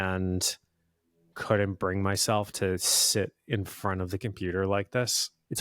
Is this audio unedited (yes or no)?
no